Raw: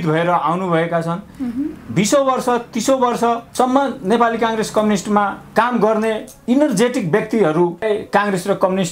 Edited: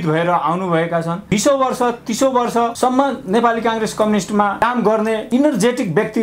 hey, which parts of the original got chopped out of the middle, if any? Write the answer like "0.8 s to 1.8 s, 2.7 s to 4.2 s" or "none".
1.2 s to 1.9 s, 3.4 s to 3.5 s, 5.7 s to 6.1 s